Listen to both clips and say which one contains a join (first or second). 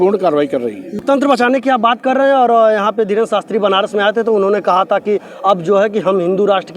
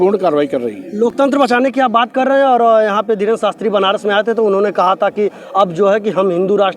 first